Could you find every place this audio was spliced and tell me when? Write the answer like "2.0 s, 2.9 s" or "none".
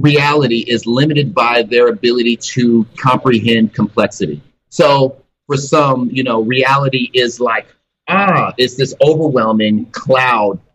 4.6 s, 5.3 s